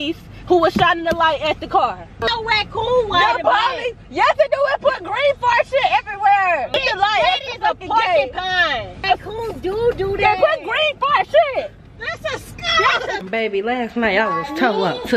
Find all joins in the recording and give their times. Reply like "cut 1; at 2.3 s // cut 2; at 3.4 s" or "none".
cut 1; at 2.2 s // cut 2; at 6.7 s // cut 3; at 9.0 s // cut 4; at 13.2 s

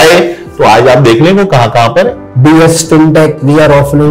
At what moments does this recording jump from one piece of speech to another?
cut 1; at 2.2 s

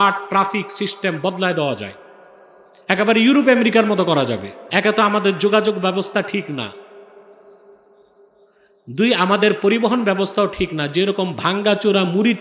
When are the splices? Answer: cut 1; at 4.5 s

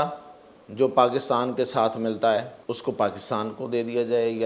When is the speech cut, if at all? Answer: cut 1; at 2.5 s

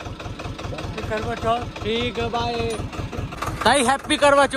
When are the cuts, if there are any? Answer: cut 1; at 3.6 s

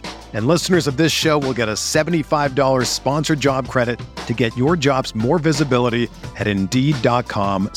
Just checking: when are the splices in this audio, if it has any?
none

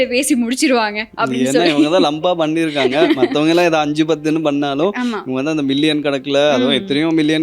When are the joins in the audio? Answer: none

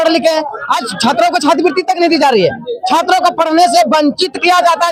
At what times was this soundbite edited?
none

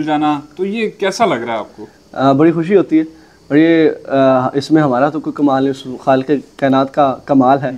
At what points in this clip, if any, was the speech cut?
none

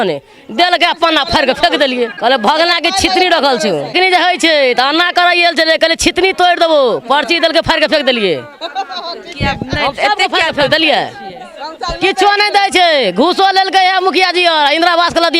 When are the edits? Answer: cut 1; at 2.1 s // cut 2; at 3.9 s

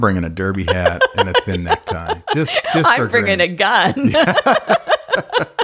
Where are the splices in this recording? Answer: none

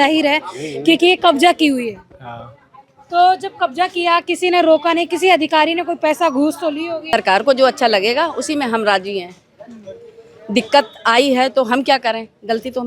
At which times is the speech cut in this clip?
cut 1; at 7.1 s

